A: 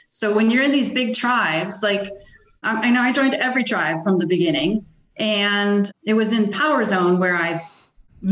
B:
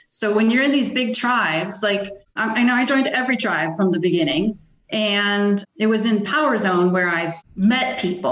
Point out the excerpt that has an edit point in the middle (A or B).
B